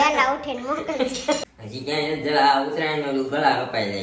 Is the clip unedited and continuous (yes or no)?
no